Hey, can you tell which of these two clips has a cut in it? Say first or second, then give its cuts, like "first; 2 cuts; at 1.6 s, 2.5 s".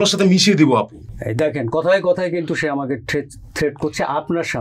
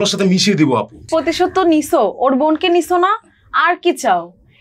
second; 1 cut; at 1.1 s